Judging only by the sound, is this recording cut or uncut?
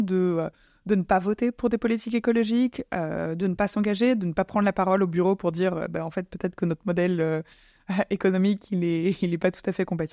uncut